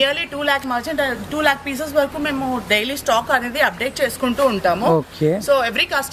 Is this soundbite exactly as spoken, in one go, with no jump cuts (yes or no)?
yes